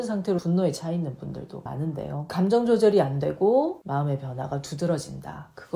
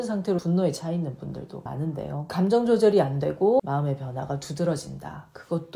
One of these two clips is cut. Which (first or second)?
second